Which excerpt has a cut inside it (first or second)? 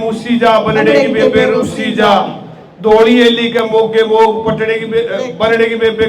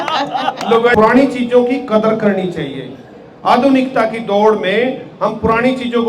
second